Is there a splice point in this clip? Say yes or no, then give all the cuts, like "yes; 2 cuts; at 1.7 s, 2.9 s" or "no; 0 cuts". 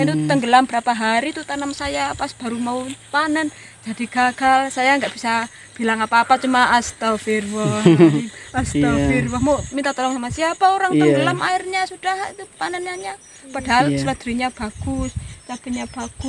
no; 0 cuts